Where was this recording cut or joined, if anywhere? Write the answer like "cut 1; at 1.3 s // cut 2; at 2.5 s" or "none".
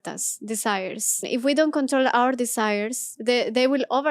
cut 1; at 1.3 s // cut 2; at 3.1 s